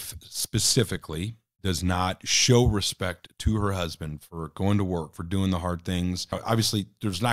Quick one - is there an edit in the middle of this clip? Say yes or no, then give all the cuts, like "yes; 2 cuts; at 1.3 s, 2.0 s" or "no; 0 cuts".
yes; 2 cuts; at 1.4 s, 6.4 s